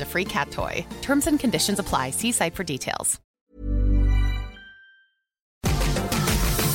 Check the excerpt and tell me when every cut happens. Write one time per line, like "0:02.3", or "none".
0:03.3
0:05.5

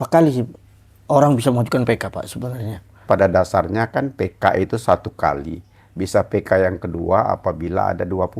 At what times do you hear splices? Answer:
none

